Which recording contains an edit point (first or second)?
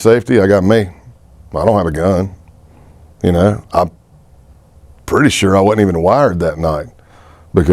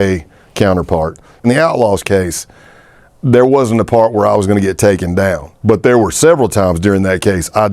second